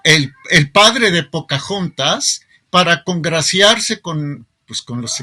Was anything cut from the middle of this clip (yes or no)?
no